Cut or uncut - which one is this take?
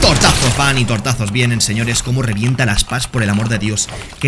uncut